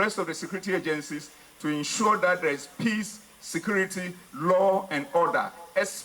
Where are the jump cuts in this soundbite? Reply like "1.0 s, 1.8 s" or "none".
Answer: none